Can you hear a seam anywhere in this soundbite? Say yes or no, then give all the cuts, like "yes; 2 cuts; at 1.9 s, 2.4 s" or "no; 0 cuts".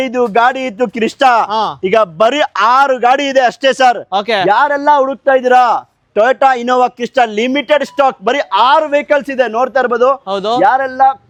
no; 0 cuts